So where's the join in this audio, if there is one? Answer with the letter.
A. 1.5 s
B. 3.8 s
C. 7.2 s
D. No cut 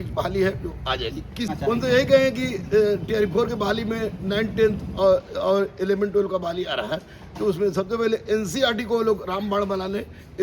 A